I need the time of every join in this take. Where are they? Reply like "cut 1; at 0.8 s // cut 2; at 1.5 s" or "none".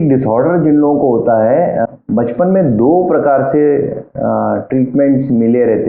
cut 1; at 1.9 s